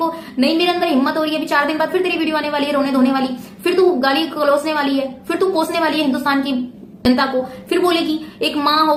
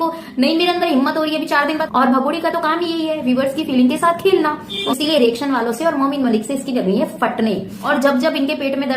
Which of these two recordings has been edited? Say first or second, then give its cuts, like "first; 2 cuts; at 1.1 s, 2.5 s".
second; 3 cuts; at 1.8 s, 4.7 s, 7.7 s